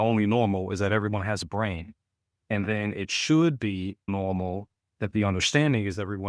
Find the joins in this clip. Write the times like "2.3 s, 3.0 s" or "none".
4.1 s